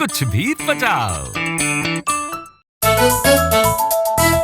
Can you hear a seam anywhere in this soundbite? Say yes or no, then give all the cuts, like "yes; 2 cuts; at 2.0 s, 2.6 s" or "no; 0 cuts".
yes; 1 cut; at 2.7 s